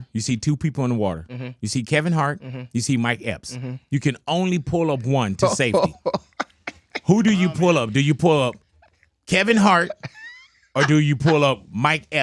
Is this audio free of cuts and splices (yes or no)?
yes